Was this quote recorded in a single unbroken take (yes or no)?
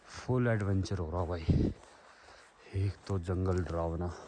yes